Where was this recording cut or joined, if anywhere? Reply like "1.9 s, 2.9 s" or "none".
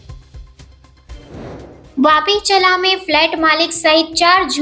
1.6 s